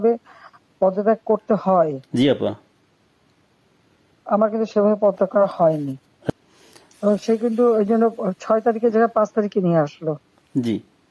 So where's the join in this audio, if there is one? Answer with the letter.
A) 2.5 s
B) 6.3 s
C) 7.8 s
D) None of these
B